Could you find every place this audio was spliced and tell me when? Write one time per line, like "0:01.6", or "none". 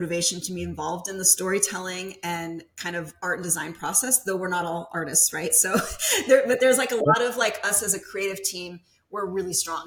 none